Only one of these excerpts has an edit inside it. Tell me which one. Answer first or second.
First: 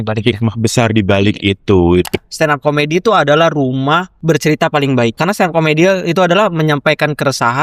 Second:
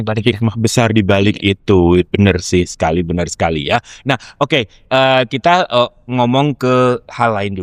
first